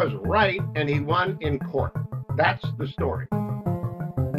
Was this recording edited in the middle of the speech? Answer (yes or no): no